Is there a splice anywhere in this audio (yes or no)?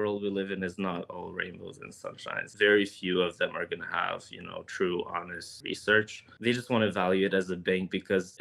yes